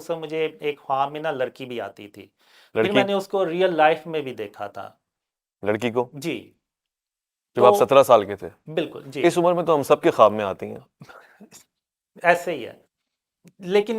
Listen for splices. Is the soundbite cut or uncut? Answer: uncut